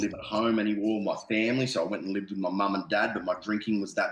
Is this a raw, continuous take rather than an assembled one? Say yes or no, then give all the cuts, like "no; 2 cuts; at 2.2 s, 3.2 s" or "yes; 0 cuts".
yes; 0 cuts